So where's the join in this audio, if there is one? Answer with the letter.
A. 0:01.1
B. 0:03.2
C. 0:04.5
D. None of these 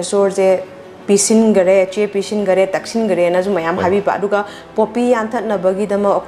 D